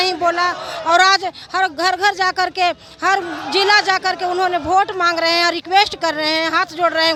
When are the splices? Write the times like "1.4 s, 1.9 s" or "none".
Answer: none